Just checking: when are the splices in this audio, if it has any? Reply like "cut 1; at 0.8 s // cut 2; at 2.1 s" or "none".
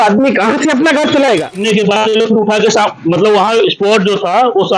cut 1; at 1.6 s